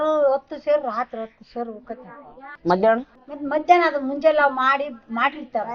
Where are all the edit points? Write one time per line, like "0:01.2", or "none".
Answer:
none